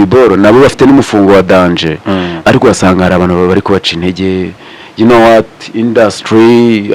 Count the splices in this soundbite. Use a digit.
0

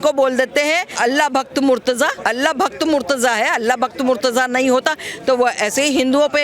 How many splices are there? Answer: 2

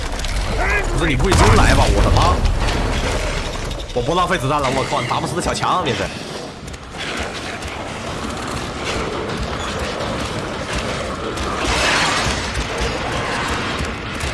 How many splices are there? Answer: 0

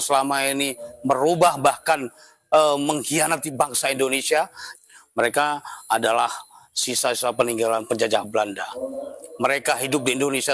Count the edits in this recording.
1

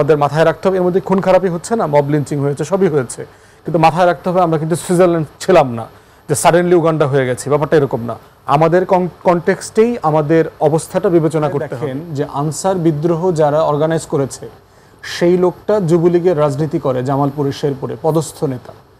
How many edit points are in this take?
1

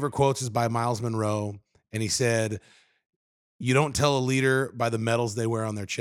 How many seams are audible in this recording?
0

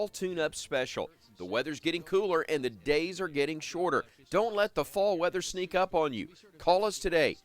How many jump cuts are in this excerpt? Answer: 1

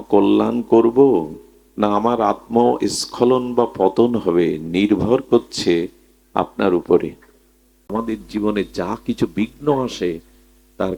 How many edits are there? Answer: 1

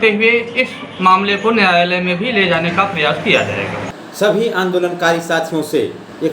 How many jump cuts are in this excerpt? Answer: 1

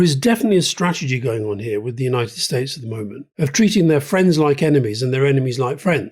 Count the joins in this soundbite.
1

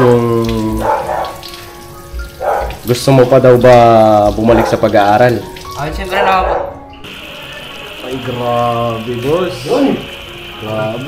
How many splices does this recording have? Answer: 1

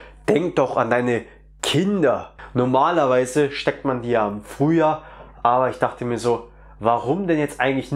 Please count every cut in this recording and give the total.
1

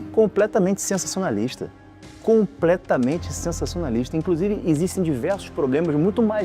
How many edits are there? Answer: 0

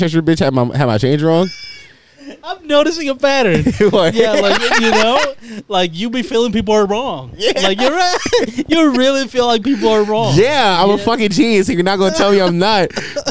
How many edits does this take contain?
0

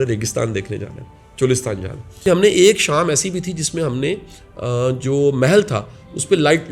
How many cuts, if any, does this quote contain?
1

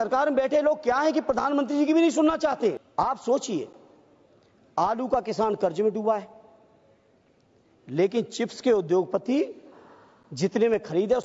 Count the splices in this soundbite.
1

